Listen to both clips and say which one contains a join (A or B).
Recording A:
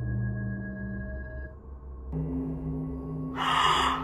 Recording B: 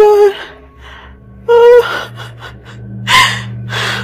A